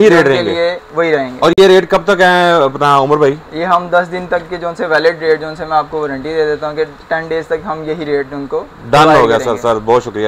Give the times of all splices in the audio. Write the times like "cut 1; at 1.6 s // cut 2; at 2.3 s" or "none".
none